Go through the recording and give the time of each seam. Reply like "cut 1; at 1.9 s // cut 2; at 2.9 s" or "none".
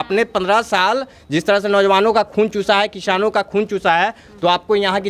none